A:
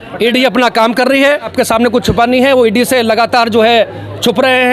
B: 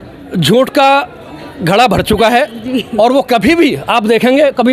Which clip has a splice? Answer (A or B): A